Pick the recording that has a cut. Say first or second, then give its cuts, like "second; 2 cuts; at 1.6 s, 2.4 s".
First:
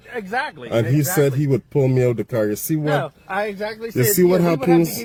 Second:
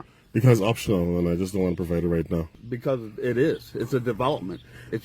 second; 1 cut; at 2.5 s